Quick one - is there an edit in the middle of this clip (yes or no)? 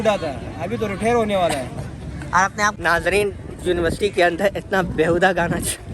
yes